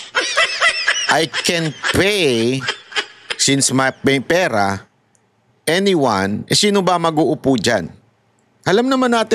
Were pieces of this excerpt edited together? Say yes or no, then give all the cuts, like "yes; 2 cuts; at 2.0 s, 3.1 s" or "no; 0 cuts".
yes; 1 cut; at 1.0 s